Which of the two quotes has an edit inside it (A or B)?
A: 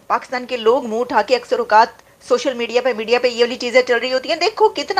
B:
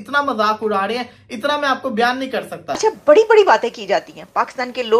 B